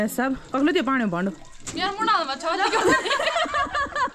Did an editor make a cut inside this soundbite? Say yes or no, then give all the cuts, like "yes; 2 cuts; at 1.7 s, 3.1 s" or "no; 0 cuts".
no; 0 cuts